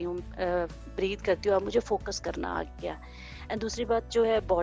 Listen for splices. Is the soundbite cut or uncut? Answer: uncut